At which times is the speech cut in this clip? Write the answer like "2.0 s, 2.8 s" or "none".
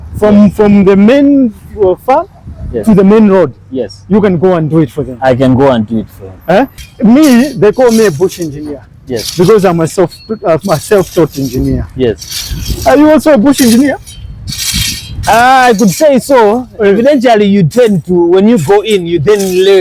6.8 s